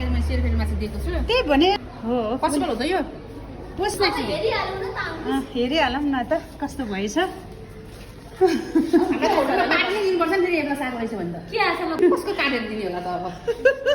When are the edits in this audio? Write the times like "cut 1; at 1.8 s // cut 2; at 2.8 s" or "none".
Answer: cut 1; at 1.8 s // cut 2; at 4.0 s // cut 3; at 12.0 s